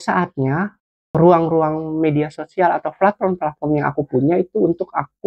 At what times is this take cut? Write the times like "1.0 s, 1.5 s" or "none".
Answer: 1.1 s